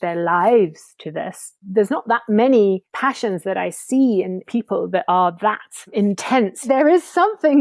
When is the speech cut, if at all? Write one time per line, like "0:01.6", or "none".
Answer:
0:01.6
0:02.9
0:06.6